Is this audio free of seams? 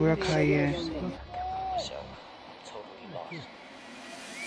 no; 1 cut; at 1.2 s

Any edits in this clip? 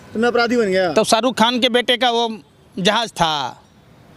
no; 0 cuts

